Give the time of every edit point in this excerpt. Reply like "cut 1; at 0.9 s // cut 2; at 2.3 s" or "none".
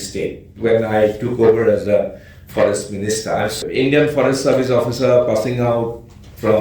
cut 1; at 3.6 s